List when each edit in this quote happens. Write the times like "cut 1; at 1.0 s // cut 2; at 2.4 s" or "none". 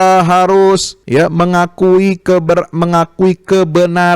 cut 1; at 0.9 s

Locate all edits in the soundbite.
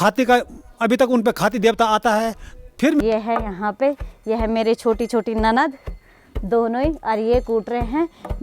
cut 1; at 3.0 s

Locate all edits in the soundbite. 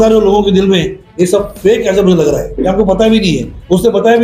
cut 1; at 2.5 s

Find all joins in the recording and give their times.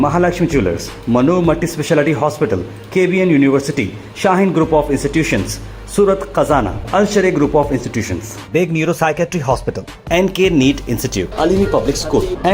none

